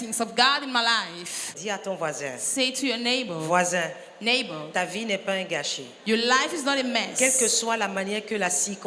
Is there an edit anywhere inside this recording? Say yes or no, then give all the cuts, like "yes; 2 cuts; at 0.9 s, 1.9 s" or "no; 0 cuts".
yes; 1 cut; at 1.5 s